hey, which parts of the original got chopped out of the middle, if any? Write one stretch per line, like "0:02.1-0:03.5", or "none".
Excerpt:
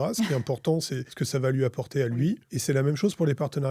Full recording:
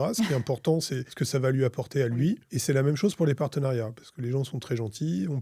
none